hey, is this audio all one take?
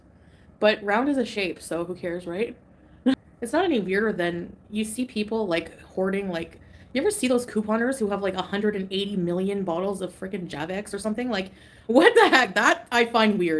no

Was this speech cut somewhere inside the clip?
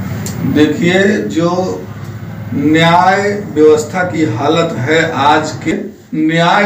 yes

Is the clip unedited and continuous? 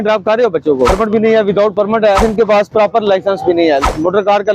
no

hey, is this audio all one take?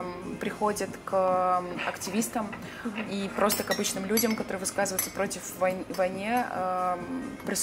yes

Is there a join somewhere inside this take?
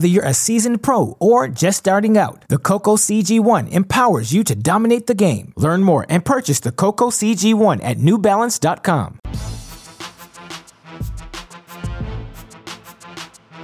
yes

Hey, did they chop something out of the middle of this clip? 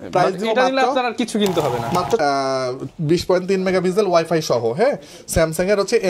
yes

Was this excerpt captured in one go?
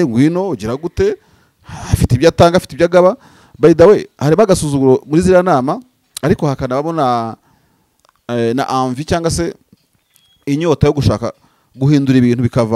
yes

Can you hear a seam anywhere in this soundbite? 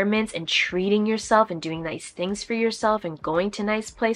no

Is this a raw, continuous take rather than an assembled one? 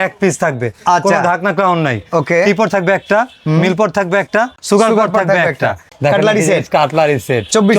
no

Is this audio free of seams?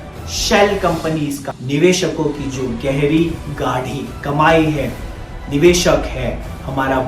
no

